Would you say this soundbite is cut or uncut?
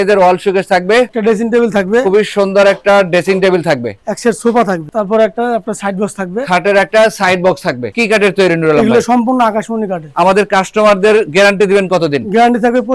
cut